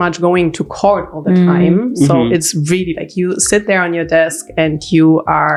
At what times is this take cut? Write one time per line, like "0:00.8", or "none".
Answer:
none